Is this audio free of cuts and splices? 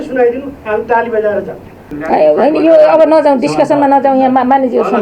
no; 1 cut; at 1.9 s

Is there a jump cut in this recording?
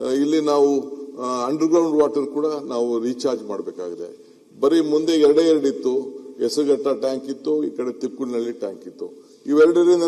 no; 0 cuts

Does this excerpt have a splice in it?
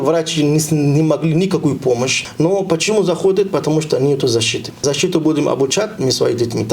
yes; 2 cuts; at 2.2 s, 4.7 s

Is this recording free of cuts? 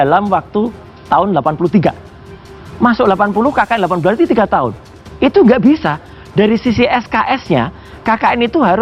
yes; 0 cuts

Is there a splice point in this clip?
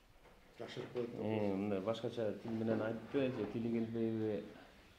no; 0 cuts

